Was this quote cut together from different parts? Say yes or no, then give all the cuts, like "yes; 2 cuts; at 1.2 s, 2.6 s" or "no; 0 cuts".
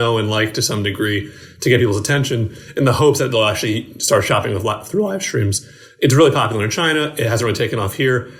no; 0 cuts